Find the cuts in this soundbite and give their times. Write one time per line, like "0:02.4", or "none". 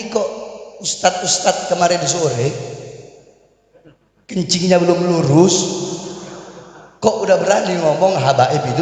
none